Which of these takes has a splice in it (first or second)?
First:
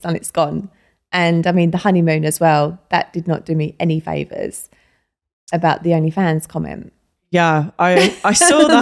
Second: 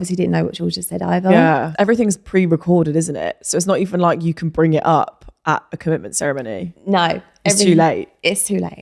second